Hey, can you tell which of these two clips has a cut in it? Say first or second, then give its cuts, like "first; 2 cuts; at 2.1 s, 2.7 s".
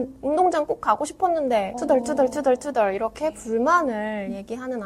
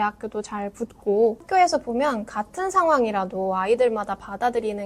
second; 1 cut; at 1.4 s